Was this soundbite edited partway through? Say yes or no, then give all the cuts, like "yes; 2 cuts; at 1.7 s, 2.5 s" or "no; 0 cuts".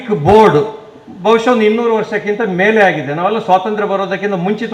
no; 0 cuts